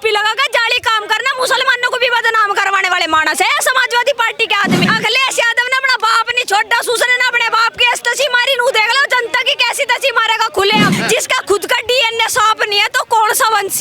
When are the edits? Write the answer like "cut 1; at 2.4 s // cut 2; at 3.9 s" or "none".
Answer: cut 1; at 4.8 s // cut 2; at 10.9 s